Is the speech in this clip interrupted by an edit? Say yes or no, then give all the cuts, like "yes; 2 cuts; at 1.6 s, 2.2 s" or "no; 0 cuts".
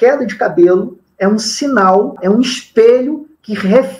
no; 0 cuts